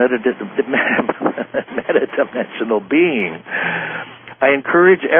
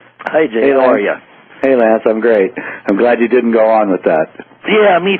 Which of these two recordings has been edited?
second; 1 cut; at 2.9 s

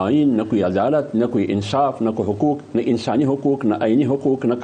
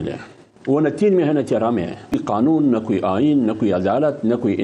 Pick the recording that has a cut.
second; 1 cut; at 2.1 s

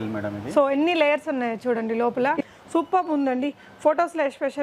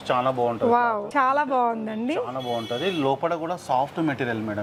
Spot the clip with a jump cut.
first; 1 cut; at 2.4 s

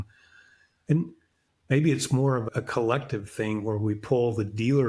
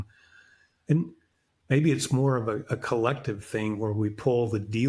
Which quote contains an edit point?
first; 1 cut; at 2.5 s

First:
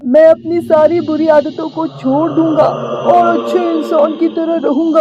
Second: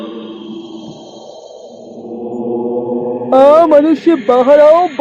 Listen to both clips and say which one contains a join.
second; 1 cut; at 3.3 s

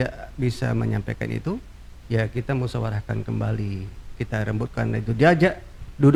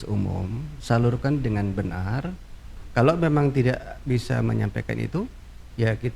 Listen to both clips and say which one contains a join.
second; 1 cut; at 2.7 s

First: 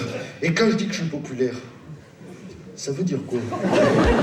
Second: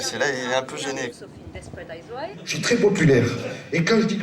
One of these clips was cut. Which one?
second; 1 cut; at 2.3 s

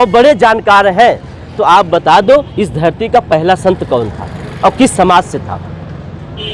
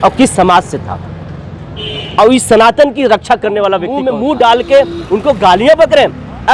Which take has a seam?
second; 1 cut; at 4.0 s

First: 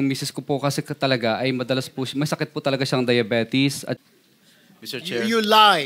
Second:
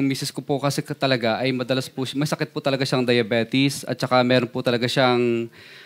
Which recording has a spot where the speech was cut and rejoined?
first; 1 cut; at 4.0 s

